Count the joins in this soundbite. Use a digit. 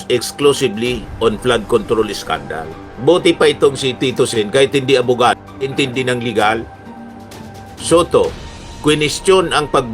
1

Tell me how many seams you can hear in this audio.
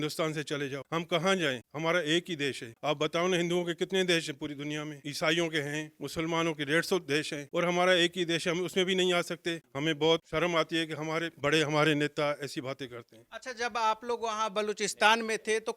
0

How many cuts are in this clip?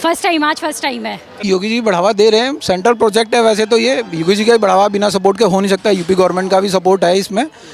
1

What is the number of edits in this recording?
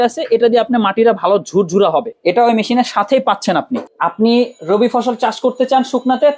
2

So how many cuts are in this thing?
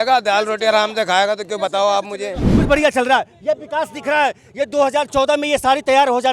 1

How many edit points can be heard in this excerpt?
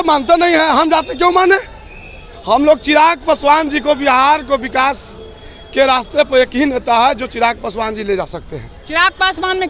0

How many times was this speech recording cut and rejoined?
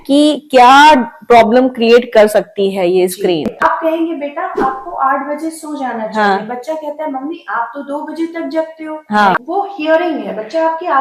2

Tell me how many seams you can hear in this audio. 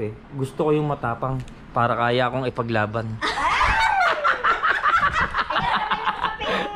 1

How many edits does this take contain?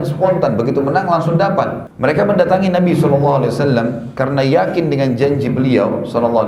1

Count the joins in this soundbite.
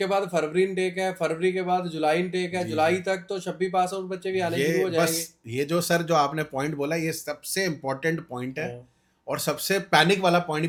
0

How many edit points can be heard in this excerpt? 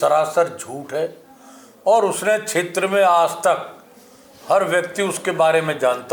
0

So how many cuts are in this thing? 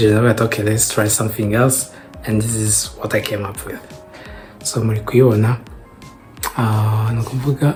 0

